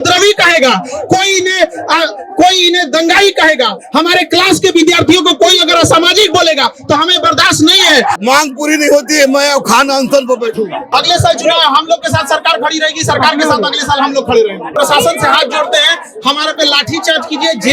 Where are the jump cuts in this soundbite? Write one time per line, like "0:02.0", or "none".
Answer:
0:08.2
0:10.8
0:14.7